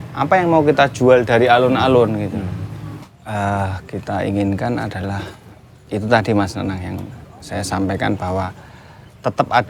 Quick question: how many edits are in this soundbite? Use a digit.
1